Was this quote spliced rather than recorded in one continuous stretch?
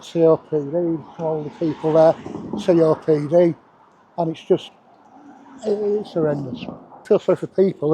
yes; 1 cut; at 7.0 s

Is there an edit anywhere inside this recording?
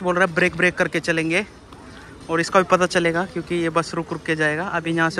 no; 0 cuts

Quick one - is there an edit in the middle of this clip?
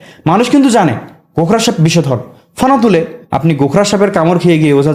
yes; 1 cut; at 3.2 s

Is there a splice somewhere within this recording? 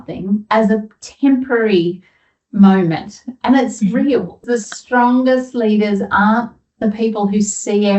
yes; 1 cut; at 4.4 s

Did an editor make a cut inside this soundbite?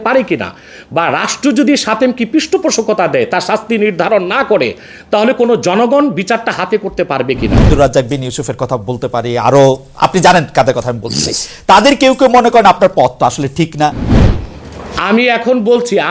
yes; 2 cuts; at 7.7 s, 14.1 s

